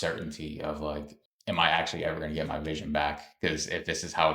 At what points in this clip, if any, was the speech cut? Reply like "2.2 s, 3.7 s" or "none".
none